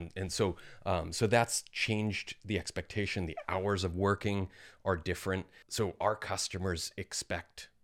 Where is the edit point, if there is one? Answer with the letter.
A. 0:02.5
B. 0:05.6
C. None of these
B